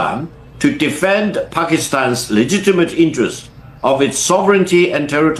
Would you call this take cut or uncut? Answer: uncut